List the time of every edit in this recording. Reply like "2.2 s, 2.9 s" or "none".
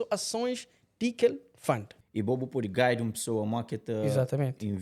2.0 s